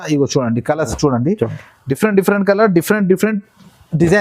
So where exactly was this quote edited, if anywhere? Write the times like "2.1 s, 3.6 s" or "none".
none